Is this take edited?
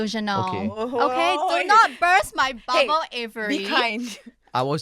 no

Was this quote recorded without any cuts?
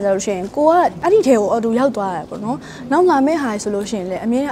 no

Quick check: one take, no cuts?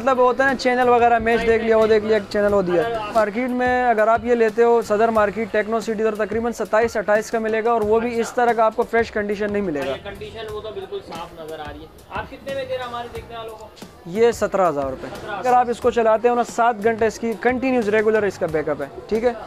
no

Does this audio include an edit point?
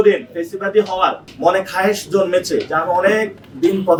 no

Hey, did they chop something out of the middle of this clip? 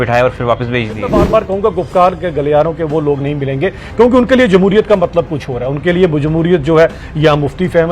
yes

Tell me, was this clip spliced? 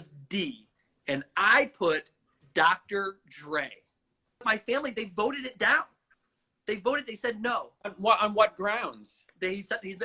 yes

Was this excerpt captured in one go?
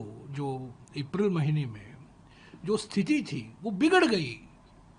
yes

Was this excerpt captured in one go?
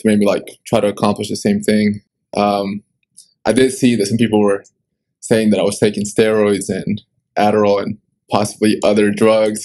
yes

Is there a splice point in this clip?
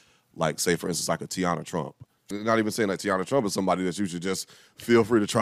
yes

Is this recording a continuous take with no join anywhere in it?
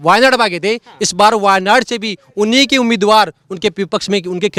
yes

